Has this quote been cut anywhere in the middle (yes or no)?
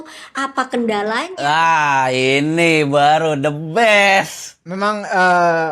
yes